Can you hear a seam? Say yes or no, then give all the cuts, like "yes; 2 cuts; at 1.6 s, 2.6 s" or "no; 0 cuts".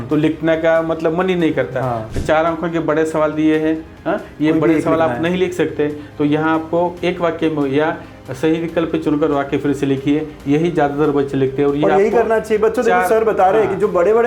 yes; 1 cut; at 2.0 s